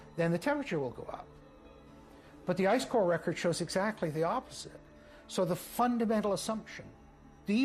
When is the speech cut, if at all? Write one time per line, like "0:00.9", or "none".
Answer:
none